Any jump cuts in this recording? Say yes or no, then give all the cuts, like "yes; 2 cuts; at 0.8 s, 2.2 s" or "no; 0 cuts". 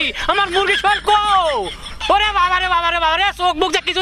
no; 0 cuts